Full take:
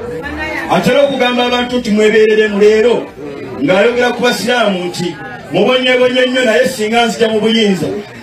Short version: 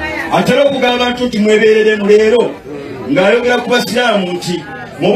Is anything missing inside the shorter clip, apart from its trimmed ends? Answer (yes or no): yes